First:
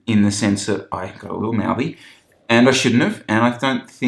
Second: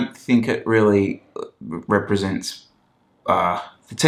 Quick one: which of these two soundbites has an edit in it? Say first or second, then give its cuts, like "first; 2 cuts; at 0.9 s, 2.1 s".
first; 1 cut; at 2.3 s